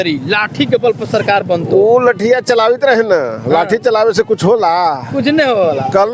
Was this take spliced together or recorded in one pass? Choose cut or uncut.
uncut